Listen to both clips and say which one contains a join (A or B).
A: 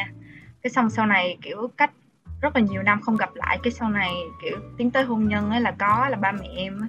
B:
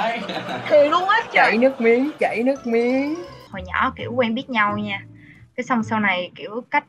B